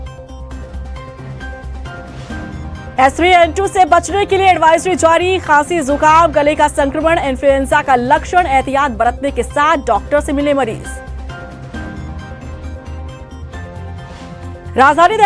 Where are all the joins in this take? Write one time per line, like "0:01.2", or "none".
0:02.4